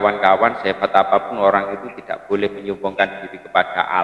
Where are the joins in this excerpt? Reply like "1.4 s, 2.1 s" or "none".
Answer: none